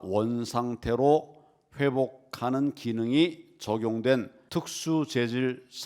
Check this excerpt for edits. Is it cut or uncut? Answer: cut